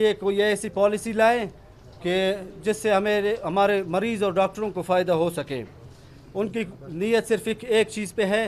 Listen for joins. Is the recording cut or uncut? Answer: uncut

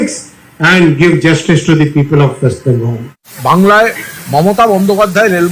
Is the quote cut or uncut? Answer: cut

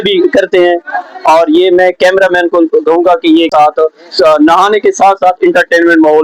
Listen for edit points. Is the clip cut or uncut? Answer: cut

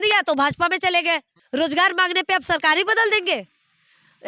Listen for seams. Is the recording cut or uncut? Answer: cut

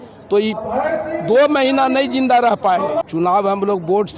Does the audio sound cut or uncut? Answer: cut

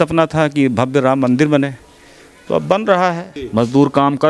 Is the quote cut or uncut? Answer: cut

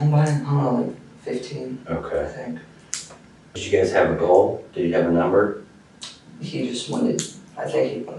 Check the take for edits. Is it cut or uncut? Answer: cut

